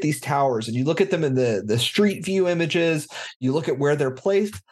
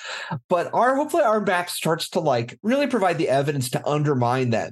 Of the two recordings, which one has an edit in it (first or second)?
second